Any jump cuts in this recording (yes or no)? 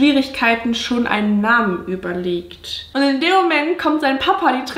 yes